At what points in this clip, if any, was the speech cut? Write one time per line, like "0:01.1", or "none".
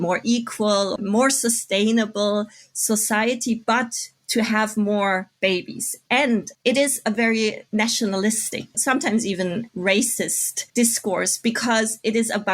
0:01.0
0:06.5
0:07.6
0:08.7